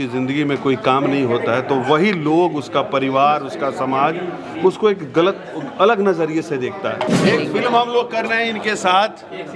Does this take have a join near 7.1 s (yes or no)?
yes